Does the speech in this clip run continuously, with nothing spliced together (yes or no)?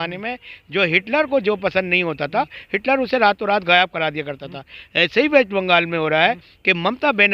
yes